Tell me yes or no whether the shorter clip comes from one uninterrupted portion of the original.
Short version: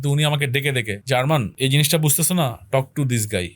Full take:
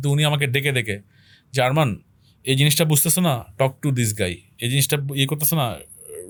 no